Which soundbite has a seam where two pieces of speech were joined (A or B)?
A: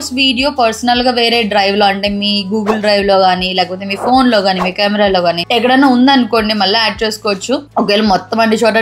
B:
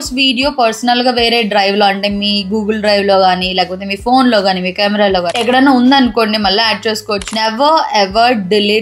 B